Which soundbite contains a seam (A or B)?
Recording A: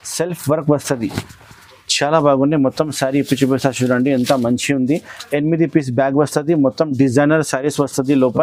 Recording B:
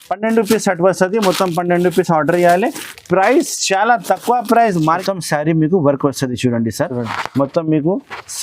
B